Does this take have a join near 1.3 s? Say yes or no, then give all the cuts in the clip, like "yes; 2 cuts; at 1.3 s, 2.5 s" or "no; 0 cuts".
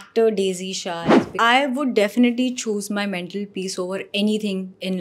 yes; 1 cut; at 1.3 s